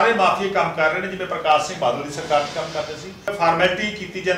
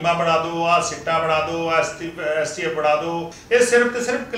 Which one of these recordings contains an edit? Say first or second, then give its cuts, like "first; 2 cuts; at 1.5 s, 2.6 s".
first; 1 cut; at 3.3 s